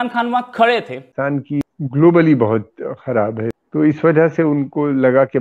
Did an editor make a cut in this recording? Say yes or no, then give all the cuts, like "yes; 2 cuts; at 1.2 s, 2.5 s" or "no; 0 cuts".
yes; 2 cuts; at 1.5 s, 3.5 s